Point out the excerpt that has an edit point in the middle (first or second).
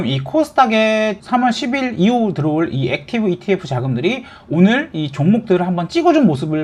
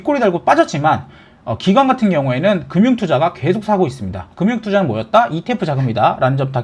first